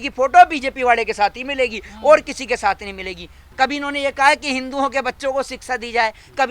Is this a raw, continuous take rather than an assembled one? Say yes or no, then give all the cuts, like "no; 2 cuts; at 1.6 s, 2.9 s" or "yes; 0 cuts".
no; 1 cut; at 3.4 s